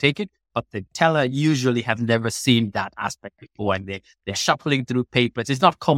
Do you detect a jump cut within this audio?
no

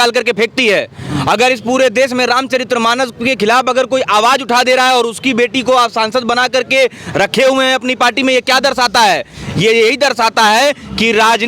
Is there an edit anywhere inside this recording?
no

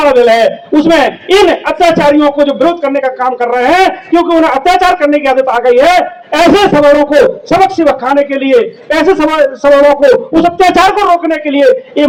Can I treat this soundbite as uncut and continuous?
yes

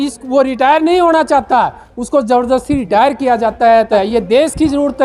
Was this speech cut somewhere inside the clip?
yes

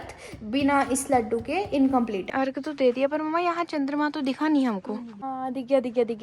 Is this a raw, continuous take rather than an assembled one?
no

